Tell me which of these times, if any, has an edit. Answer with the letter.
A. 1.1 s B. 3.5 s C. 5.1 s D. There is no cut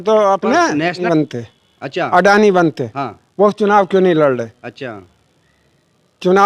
A